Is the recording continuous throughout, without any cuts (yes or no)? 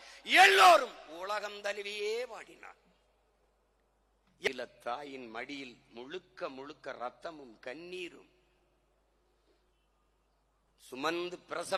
no